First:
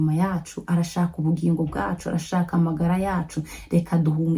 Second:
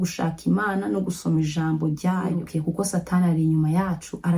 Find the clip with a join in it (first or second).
second